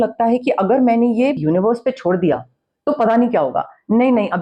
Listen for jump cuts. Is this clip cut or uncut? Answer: cut